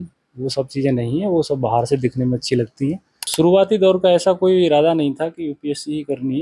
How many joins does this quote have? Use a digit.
1